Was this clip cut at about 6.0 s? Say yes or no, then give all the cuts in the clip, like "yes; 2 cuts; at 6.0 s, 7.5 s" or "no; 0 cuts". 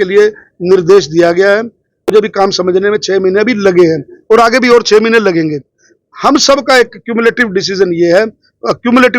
no; 1 cut; at 2.1 s